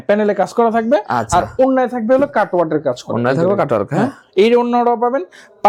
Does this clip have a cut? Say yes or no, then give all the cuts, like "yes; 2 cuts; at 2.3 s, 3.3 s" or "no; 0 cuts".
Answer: no; 0 cuts